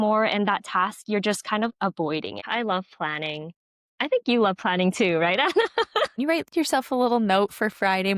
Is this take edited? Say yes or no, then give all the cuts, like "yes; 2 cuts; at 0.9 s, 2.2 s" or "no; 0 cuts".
yes; 2 cuts; at 2.4 s, 6.2 s